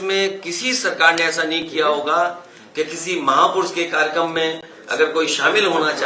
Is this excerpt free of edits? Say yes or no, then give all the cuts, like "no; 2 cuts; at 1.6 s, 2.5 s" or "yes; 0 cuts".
yes; 0 cuts